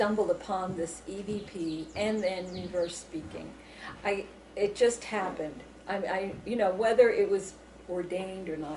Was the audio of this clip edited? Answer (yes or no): no